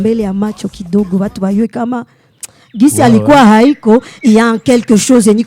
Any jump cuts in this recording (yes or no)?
no